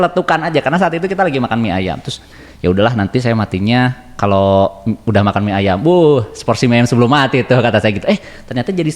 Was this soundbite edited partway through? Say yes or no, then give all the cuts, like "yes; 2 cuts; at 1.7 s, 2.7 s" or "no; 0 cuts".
no; 0 cuts